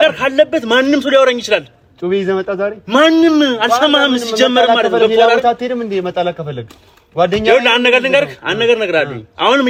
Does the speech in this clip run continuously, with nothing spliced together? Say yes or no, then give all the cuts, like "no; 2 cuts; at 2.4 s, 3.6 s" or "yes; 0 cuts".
yes; 0 cuts